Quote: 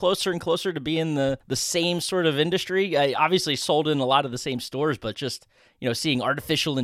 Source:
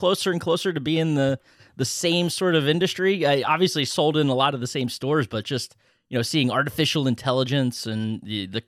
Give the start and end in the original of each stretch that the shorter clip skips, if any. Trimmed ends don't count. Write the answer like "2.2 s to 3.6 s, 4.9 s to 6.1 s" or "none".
1.5 s to 1.8 s